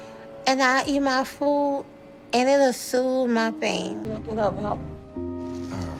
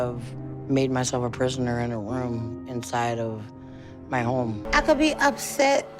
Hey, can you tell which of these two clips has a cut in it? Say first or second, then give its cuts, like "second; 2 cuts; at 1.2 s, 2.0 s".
second; 1 cut; at 4.6 s